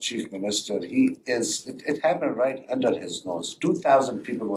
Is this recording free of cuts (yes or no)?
yes